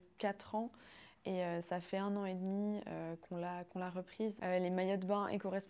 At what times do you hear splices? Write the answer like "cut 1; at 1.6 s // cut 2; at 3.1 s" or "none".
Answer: cut 1; at 4.4 s